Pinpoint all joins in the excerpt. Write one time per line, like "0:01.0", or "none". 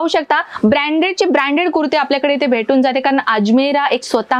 none